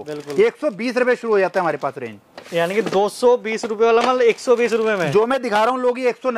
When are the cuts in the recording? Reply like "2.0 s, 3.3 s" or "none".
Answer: none